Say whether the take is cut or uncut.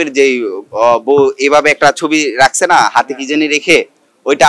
uncut